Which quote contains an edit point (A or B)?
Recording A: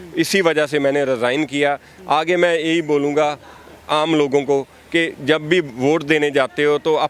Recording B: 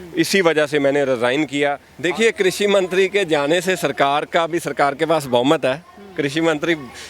B